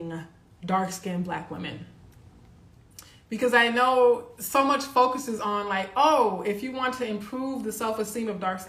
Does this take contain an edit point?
no; 0 cuts

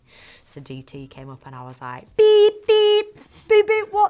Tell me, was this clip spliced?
no; 0 cuts

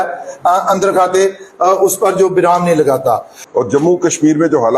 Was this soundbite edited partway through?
yes; 1 cut; at 3.3 s

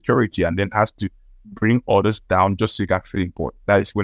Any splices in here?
no; 0 cuts

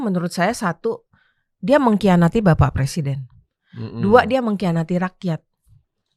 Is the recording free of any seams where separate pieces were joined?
yes; 0 cuts

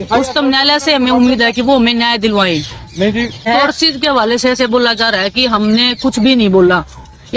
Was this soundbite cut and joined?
yes; 1 cut; at 3.4 s

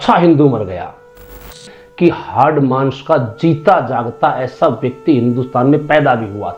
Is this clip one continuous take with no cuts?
no; 1 cut; at 1.6 s

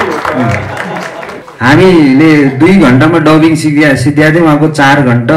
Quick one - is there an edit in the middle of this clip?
yes; 1 cut; at 1.4 s

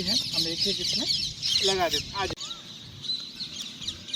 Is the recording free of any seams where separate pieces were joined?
no; 1 cut; at 2.3 s

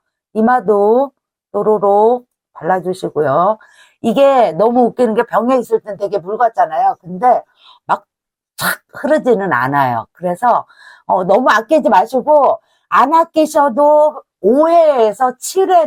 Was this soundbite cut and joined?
no; 0 cuts

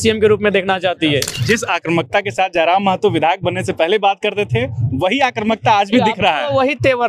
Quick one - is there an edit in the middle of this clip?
yes; 1 cut; at 1.3 s

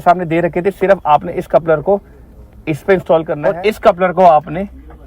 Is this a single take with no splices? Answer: no; 1 cut; at 3.4 s

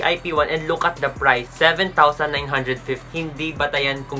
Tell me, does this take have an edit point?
yes; 2 cuts; at 1.5 s, 3.1 s

